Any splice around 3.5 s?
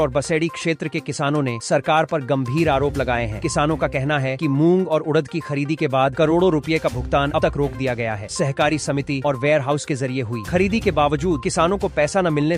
no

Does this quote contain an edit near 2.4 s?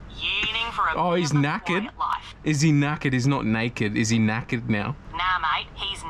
no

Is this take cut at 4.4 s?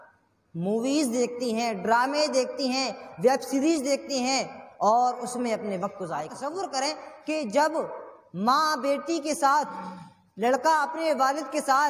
no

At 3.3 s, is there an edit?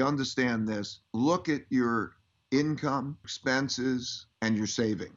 yes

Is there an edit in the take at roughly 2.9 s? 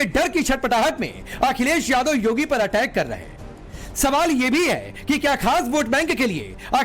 yes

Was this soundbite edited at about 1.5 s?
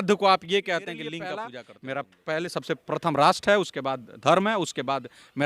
yes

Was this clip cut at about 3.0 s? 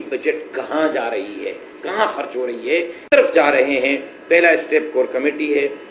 yes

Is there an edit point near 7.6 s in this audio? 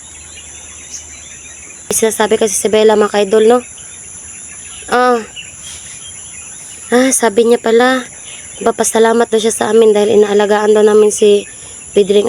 no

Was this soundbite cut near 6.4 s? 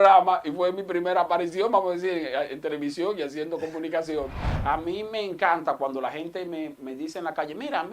no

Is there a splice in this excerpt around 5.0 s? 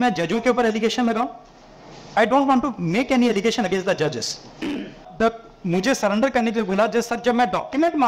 yes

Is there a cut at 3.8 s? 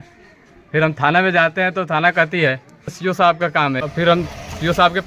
yes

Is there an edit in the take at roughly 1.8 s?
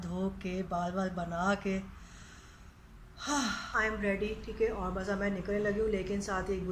no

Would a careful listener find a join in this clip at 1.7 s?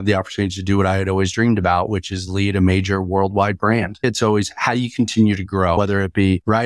no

